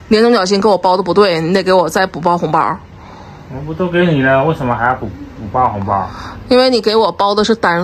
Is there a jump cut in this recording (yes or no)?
no